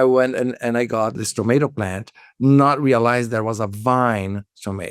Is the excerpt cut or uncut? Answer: cut